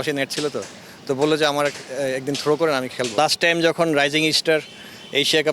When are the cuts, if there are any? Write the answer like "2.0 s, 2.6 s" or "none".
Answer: 3.1 s